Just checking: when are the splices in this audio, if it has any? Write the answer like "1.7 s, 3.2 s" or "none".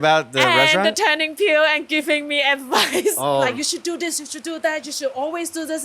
3.5 s